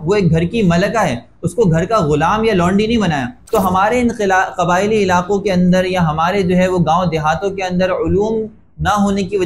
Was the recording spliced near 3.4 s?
yes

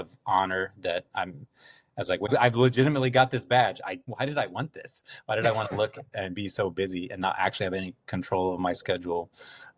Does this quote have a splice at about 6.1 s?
no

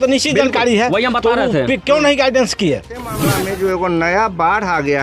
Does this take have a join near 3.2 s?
yes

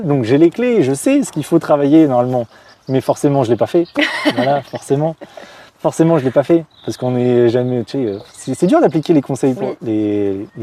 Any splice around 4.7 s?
no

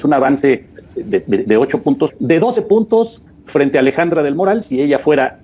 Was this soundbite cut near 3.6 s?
no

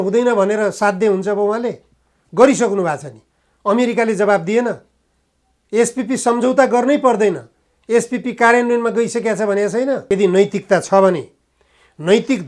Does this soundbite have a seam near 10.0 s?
yes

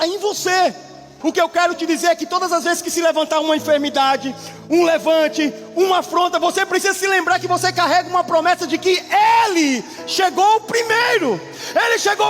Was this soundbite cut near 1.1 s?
yes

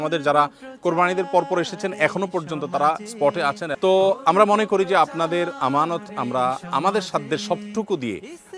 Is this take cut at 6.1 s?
no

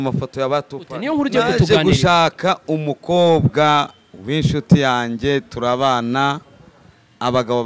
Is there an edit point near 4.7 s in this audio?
no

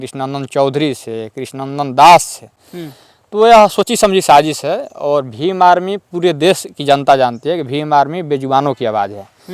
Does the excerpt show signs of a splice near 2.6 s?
no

